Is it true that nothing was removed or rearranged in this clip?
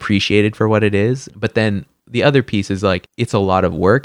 no; 2 cuts; at 1.3 s, 3.1 s

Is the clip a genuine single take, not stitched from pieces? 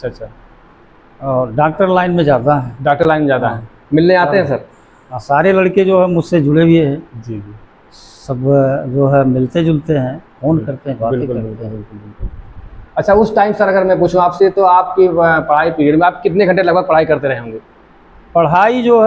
yes; 0 cuts

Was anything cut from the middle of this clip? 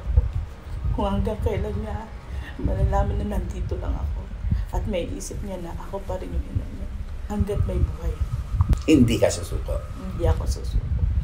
no; 0 cuts

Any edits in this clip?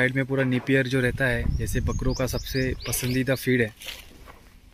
no; 0 cuts

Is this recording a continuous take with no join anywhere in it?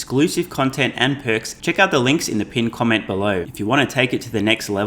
no; 2 cuts; at 1.5 s, 3.5 s

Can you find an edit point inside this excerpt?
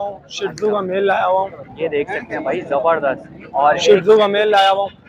no; 0 cuts

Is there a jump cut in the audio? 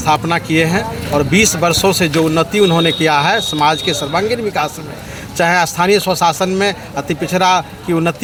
no; 0 cuts

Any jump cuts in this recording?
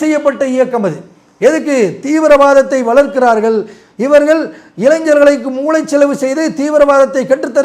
no; 0 cuts

